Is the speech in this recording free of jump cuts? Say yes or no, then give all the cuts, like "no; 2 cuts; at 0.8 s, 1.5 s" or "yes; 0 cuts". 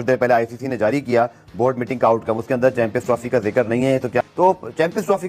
no; 1 cut; at 4.2 s